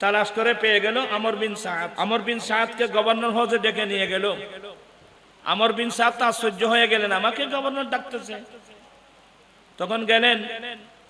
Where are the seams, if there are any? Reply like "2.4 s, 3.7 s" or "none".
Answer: 1.9 s